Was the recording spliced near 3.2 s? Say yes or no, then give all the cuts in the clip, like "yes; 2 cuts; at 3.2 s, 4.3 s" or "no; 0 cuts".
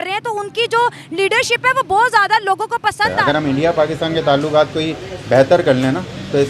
yes; 1 cut; at 3.2 s